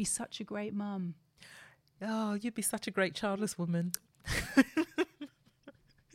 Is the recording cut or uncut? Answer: uncut